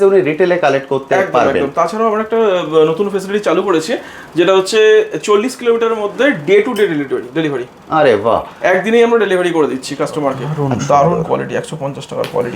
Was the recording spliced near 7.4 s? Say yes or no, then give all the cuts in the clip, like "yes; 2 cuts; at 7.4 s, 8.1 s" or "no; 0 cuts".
no; 1 cut; at 10.5 s